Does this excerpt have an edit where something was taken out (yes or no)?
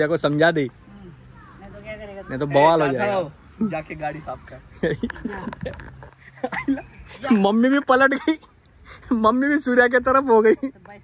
no